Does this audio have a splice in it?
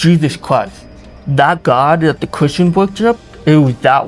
no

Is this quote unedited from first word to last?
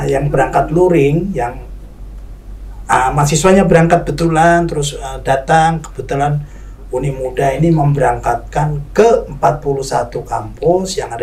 yes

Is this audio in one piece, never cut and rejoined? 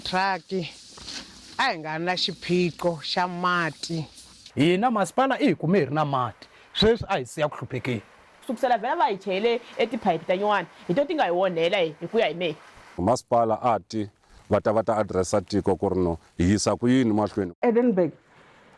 no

